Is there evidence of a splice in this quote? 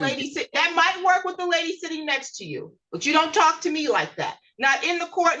no; 0 cuts

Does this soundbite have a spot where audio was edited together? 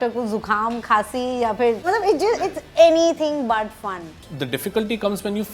yes; 2 cuts; at 1.8 s, 4.2 s

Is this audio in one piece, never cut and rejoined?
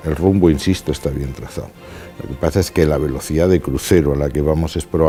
yes; 0 cuts

